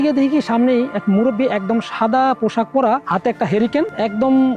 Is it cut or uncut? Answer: uncut